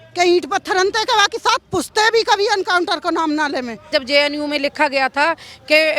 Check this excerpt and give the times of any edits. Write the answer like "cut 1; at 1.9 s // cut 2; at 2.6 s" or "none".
cut 1; at 3.9 s